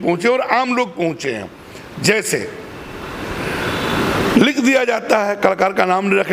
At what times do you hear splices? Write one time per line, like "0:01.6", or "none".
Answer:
none